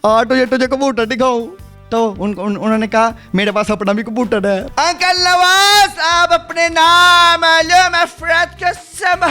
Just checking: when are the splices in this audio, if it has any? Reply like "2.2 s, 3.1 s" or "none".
4.7 s